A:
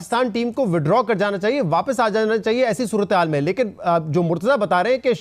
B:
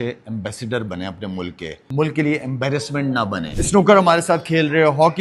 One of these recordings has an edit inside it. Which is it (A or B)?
B